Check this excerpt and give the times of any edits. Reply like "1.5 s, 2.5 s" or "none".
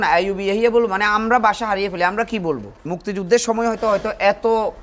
2.9 s

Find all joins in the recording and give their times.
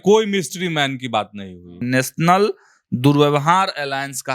1.8 s

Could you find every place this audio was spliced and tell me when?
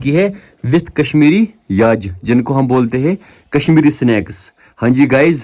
none

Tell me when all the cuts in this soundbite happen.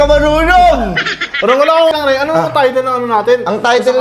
1.9 s

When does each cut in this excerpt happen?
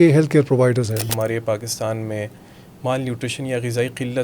1.0 s

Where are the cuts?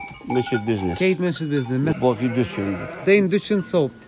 2.0 s

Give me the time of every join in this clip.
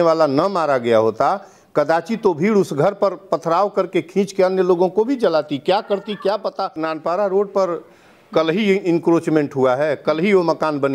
6.8 s

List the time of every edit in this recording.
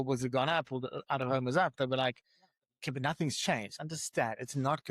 3.9 s

